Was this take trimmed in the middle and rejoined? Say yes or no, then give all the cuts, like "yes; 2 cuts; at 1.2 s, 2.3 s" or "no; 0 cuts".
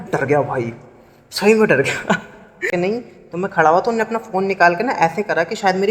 yes; 1 cut; at 2.7 s